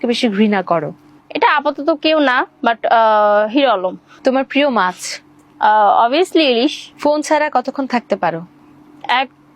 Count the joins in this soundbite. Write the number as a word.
zero